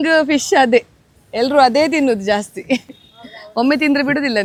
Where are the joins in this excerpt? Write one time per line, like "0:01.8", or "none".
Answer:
none